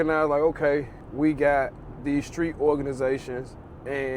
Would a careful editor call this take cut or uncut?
cut